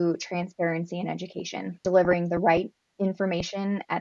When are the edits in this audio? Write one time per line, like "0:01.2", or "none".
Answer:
0:01.7